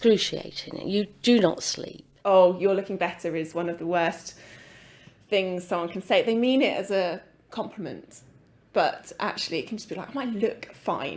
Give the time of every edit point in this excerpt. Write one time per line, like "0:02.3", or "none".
0:02.1